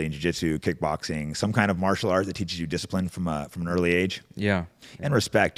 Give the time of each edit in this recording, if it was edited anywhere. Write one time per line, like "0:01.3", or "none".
none